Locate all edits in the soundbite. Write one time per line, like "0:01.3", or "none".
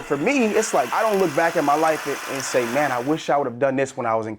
0:00.9